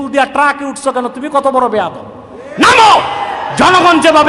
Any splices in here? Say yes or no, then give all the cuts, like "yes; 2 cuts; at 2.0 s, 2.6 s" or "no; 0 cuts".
no; 0 cuts